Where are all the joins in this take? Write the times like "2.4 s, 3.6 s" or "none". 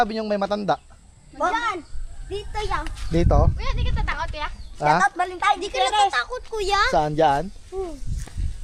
none